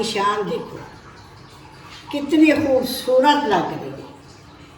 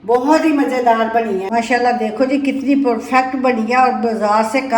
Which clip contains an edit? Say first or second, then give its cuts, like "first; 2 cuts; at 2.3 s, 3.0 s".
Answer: second; 1 cut; at 1.5 s